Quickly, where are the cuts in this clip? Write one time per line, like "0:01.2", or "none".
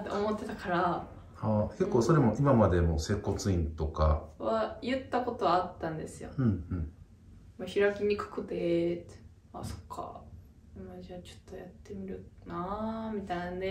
none